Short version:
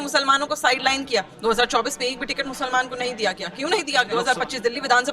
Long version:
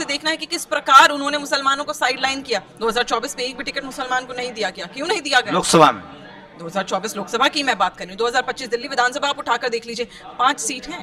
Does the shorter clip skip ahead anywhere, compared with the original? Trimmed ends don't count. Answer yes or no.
yes